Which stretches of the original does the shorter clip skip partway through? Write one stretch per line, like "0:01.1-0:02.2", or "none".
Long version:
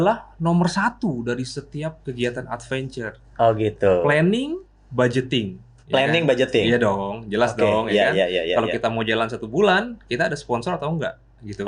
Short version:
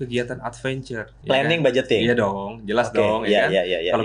0:03.1-0:05.7